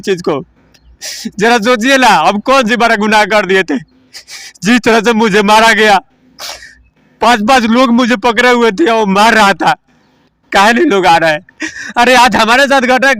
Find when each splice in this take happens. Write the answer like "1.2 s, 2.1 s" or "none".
none